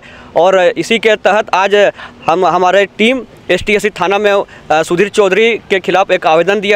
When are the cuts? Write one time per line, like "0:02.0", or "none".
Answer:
none